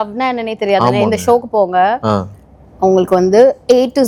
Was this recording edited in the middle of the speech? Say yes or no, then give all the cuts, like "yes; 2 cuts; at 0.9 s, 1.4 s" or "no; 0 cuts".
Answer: no; 0 cuts